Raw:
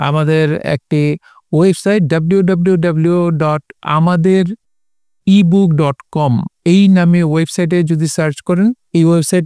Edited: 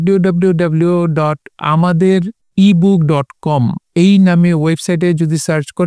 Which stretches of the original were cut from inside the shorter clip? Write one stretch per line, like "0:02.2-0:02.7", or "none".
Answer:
0:04.6-0:05.1